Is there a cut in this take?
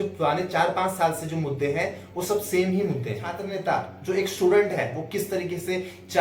yes; 1 cut; at 3.4 s

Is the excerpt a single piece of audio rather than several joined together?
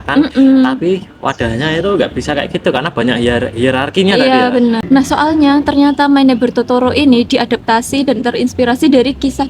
no; 1 cut; at 4.8 s

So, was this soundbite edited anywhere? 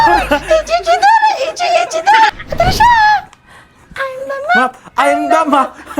yes; 1 cut; at 2.3 s

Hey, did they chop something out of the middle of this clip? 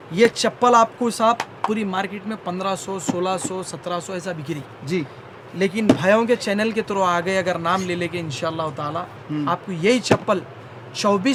no; 0 cuts

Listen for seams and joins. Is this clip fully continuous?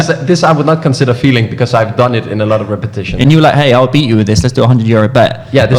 no; 1 cut; at 3.2 s

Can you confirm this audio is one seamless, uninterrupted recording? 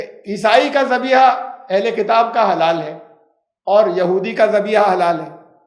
yes; 0 cuts

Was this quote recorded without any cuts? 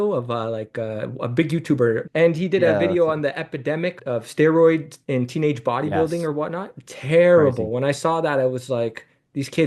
no; 2 cuts; at 2.0 s, 3.9 s

